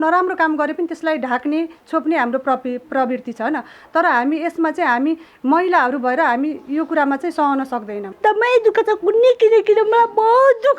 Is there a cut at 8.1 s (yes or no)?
yes